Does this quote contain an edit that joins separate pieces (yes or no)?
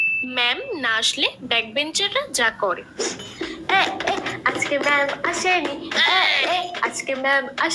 yes